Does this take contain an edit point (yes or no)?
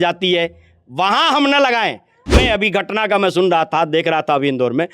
yes